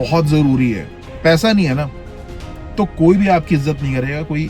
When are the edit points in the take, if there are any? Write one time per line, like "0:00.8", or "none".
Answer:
0:00.9

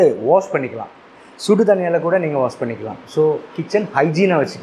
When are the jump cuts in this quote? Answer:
0:03.5

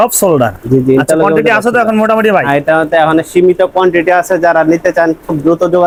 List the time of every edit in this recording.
none

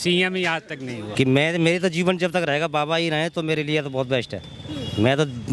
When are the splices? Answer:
0:01.0

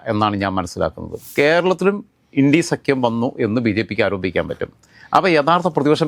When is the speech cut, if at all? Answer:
0:01.3

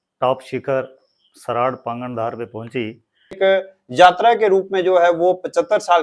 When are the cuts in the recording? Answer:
0:03.4

